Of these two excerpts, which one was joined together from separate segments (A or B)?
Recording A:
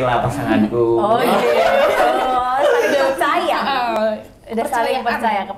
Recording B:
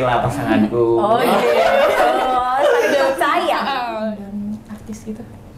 B